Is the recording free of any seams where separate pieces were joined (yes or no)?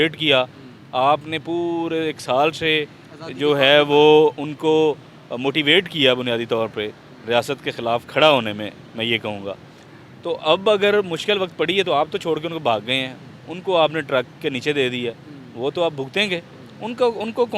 yes